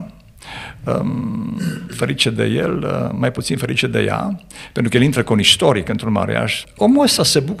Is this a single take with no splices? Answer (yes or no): no